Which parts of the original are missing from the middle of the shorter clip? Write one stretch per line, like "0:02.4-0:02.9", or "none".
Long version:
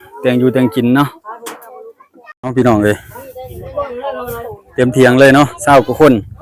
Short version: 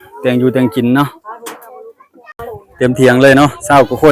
0:02.4-0:04.4